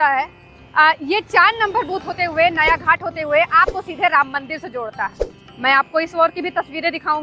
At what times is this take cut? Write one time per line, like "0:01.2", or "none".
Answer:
none